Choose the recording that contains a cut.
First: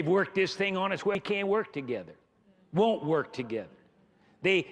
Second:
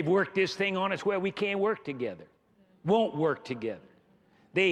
first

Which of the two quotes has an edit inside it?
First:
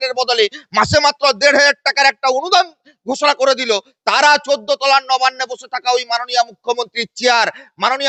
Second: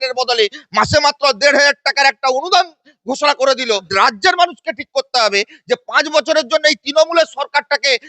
second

